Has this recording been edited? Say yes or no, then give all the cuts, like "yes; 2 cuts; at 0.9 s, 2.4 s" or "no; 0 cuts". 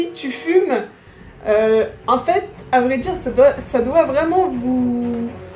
no; 0 cuts